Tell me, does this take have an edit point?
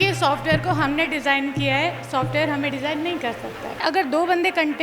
yes; 1 cut; at 3.8 s

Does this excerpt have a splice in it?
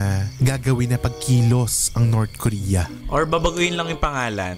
yes; 1 cut; at 2.9 s

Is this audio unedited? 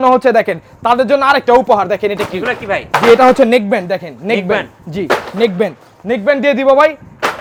yes; 0 cuts

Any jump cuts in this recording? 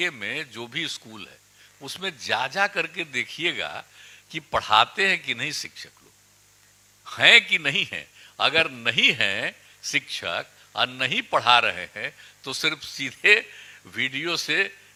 no; 0 cuts

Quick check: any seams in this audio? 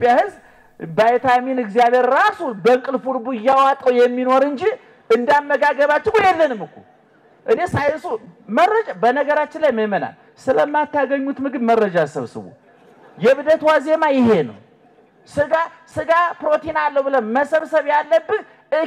no; 0 cuts

